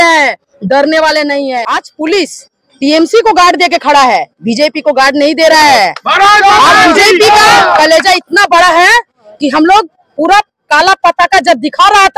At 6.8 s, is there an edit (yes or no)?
no